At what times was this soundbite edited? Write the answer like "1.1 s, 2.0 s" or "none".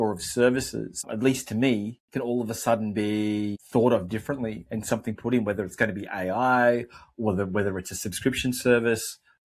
1.1 s, 3.6 s